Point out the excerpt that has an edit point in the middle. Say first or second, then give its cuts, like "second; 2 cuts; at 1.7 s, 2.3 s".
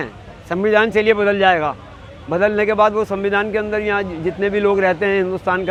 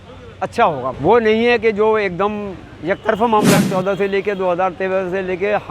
second; 2 cuts; at 0.9 s, 3.6 s